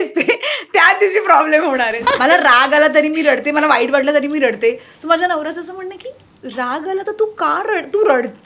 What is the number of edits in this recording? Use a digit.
1